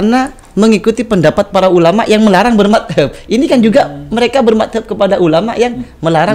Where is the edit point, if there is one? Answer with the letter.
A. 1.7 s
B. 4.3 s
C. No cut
C